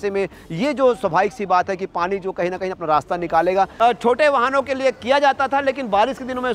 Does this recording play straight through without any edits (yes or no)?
no